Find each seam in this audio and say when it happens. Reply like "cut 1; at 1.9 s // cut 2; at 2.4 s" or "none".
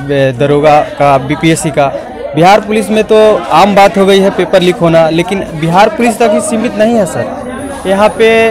none